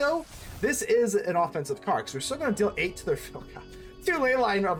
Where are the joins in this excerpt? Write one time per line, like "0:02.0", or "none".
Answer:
none